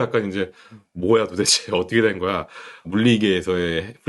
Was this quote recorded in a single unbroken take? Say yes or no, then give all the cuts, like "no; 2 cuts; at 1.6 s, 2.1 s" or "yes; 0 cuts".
no; 1 cut; at 2.8 s